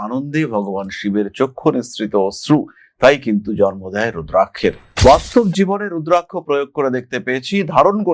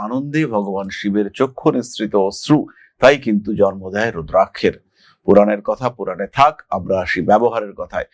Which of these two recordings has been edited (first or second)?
first